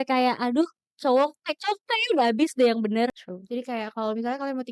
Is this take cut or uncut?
cut